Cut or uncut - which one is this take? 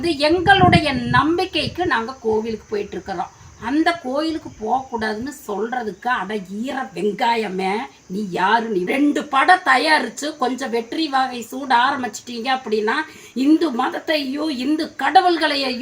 cut